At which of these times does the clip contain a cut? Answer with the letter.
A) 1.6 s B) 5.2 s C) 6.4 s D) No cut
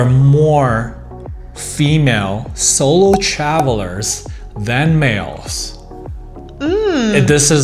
D